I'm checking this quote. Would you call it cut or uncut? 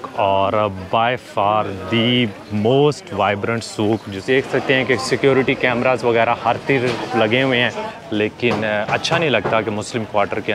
cut